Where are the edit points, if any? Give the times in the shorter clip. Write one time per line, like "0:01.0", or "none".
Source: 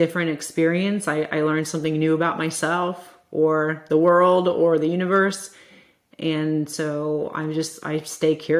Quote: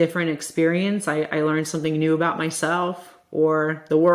none